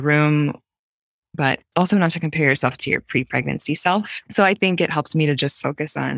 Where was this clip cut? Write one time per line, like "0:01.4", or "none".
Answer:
0:01.4
0:04.2